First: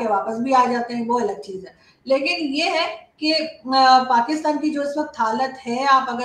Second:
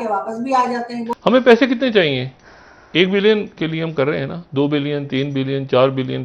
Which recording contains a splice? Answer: second; 1 cut; at 1.1 s

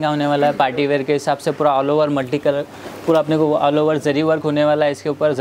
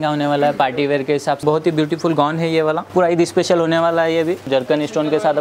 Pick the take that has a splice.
second; 3 cuts; at 1.4 s, 2.8 s, 4.4 s

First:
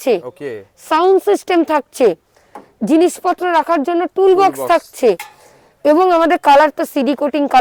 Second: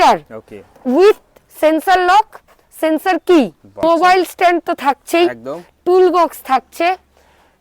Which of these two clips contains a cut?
second; 1 cut; at 3.8 s

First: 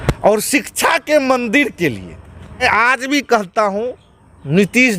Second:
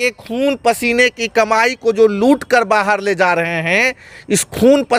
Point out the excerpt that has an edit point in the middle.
first; 1 cut; at 2.6 s

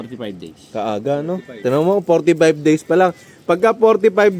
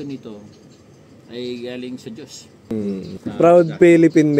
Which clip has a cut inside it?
second; 1 cut; at 2.6 s

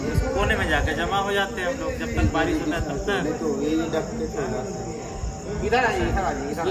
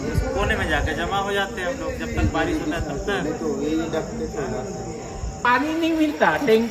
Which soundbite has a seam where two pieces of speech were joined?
second; 1 cut; at 5.4 s

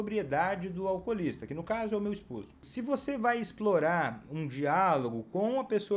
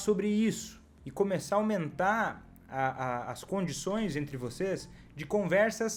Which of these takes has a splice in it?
first; 1 cut; at 2.6 s

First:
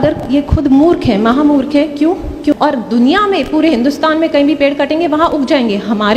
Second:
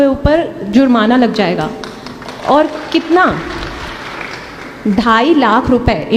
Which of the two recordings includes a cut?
first; 1 cut; at 2.5 s

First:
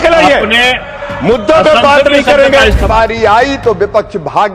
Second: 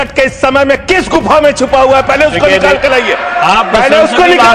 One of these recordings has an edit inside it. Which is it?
first; 1 cut; at 2.8 s

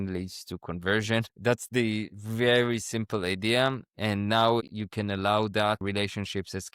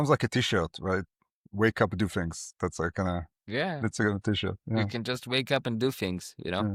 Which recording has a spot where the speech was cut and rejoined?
first; 2 cuts; at 4.7 s, 5.8 s

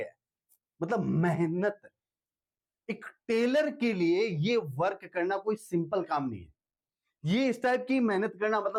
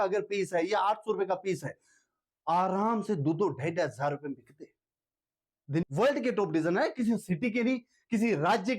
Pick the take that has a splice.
second; 1 cut; at 5.8 s

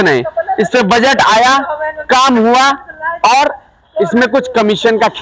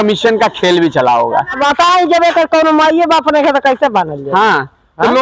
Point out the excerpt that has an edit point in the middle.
second; 1 cut; at 1.6 s

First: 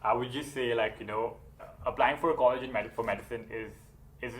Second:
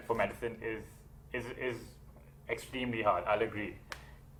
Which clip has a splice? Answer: first; 1 cut; at 1.7 s

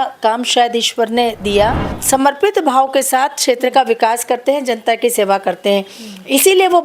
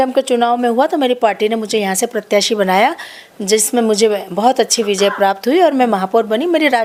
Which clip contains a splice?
first; 1 cut; at 1.9 s

